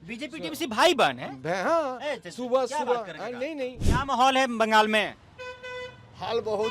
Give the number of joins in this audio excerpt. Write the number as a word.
one